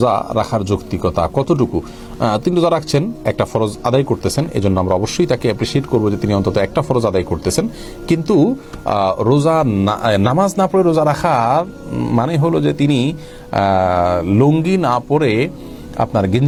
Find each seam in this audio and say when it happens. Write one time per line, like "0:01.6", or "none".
none